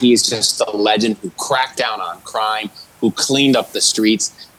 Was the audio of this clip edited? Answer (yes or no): no